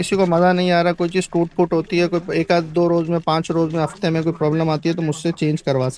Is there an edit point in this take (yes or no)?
no